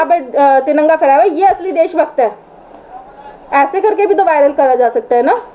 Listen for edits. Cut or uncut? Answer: uncut